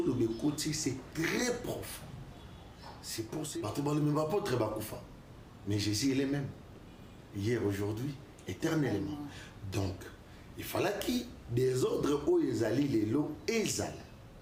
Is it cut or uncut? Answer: cut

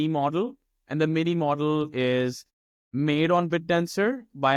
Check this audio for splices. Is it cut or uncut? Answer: uncut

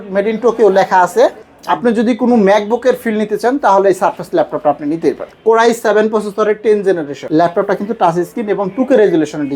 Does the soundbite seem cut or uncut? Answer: cut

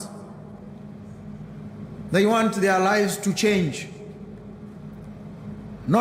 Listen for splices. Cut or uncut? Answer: uncut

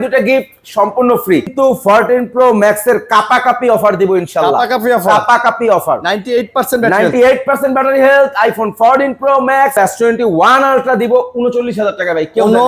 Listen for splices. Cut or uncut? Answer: cut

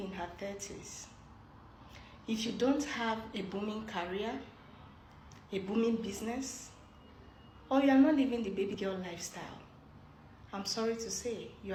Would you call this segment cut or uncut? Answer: uncut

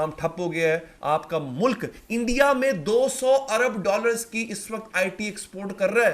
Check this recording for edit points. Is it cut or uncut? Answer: cut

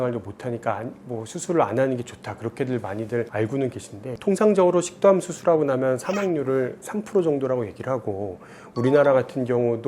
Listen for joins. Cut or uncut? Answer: cut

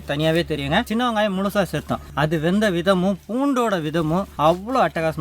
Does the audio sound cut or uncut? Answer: cut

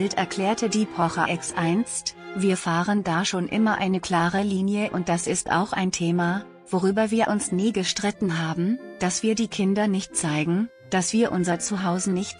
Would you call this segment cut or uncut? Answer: uncut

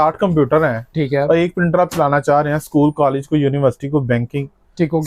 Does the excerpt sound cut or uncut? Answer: uncut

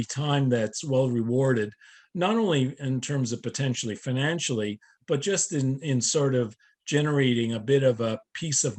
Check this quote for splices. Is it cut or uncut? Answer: uncut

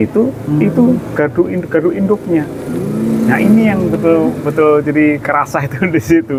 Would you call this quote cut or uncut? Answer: uncut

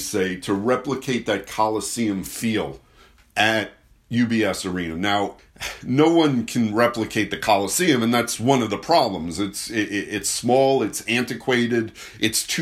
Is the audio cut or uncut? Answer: uncut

